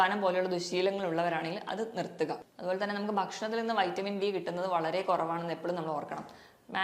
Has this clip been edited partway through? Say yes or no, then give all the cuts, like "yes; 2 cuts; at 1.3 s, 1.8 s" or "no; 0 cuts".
yes; 1 cut; at 2.5 s